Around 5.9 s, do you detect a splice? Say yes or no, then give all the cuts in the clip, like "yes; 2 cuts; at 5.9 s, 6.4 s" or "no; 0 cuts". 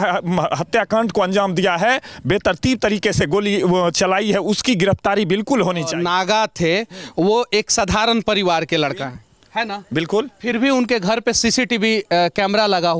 yes; 1 cut; at 5.9 s